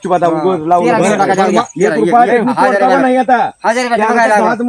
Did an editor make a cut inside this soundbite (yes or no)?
no